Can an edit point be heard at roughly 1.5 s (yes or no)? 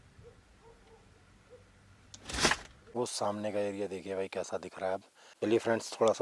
no